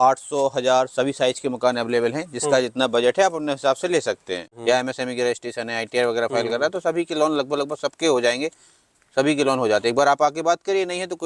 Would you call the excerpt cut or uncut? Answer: cut